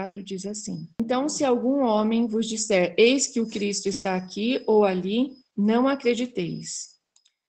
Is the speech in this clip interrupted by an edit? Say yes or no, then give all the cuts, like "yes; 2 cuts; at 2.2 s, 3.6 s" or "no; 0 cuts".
yes; 1 cut; at 1.0 s